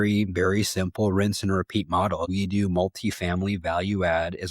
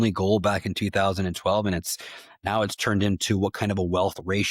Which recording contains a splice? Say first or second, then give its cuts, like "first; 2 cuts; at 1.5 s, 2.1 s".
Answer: first; 1 cut; at 2.3 s